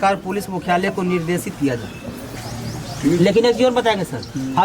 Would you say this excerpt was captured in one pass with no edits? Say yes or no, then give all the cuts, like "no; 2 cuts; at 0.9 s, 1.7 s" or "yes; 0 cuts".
no; 1 cut; at 2.4 s